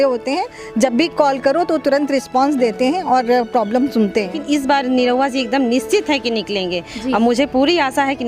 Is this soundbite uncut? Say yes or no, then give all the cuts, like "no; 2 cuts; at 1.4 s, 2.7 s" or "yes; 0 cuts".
no; 1 cut; at 4.4 s